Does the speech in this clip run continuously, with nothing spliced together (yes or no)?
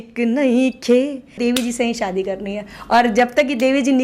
no